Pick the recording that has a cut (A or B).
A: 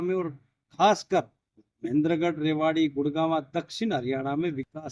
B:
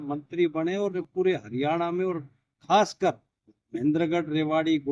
B